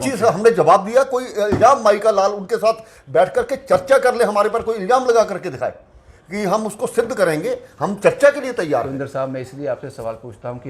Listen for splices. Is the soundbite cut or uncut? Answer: uncut